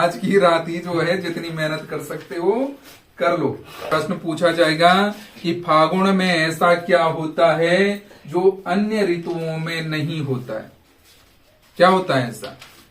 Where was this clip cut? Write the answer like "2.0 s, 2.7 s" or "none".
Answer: 3.7 s